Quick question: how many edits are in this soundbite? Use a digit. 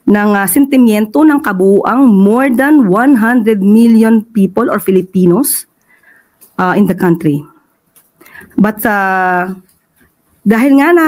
0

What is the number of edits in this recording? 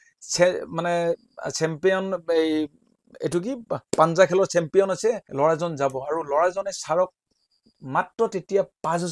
1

